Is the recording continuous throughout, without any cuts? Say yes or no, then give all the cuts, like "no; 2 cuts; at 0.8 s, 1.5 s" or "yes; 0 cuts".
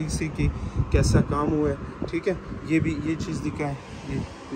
yes; 0 cuts